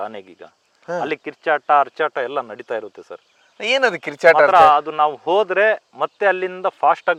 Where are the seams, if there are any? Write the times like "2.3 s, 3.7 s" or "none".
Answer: none